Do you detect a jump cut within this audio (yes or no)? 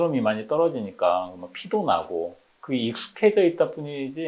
no